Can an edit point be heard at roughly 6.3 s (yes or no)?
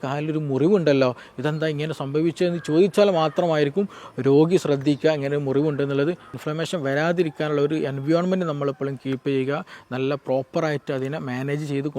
yes